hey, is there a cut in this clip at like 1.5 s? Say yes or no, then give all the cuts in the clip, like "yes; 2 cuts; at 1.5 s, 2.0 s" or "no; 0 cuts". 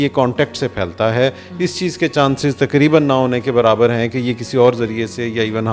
no; 0 cuts